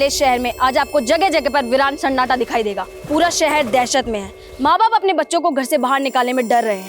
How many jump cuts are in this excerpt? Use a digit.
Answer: 1